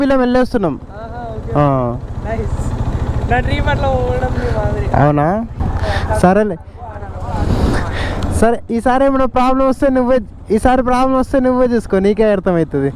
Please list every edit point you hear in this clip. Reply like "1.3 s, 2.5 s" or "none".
5.7 s